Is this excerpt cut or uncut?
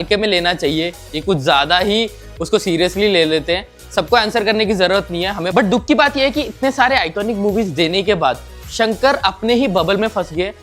cut